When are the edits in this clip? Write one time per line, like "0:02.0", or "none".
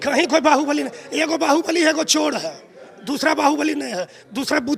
none